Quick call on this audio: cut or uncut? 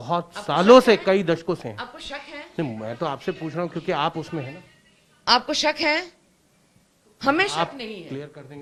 uncut